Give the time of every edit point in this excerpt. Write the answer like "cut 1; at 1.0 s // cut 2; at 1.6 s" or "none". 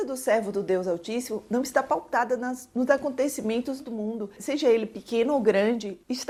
none